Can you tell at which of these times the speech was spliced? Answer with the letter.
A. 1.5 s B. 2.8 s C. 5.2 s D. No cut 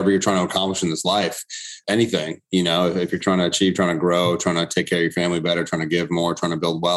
D